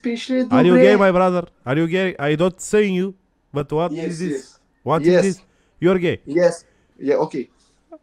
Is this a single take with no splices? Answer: yes; 0 cuts

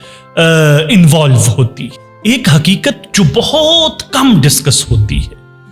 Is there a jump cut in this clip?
no; 0 cuts

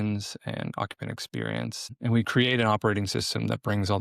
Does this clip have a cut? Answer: yes; 1 cut; at 1.8 s

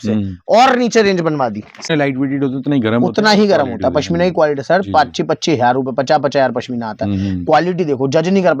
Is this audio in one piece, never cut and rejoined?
no; 1 cut; at 1.9 s

